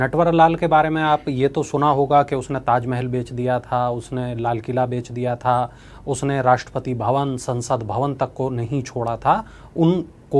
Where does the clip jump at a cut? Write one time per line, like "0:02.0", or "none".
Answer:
none